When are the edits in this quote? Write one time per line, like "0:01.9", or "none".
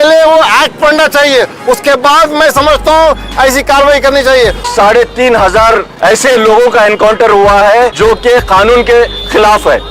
0:04.7
0:05.9
0:07.9